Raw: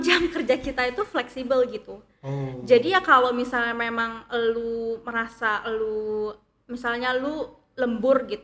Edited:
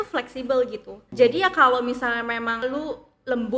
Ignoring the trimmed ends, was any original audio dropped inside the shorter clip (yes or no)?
yes